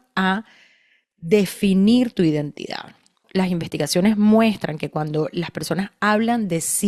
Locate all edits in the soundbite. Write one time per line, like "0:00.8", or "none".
0:03.2